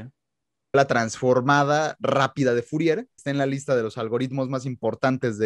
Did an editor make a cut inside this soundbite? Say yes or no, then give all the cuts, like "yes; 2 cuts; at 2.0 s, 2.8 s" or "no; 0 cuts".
yes; 2 cuts; at 0.7 s, 3.2 s